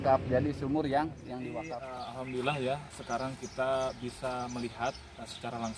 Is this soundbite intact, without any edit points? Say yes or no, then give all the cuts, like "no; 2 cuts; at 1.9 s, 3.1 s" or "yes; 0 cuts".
no; 1 cut; at 1.6 s